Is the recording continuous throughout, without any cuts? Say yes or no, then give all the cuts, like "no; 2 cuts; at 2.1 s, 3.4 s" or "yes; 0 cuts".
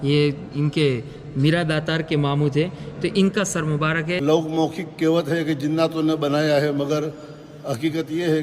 no; 1 cut; at 4.2 s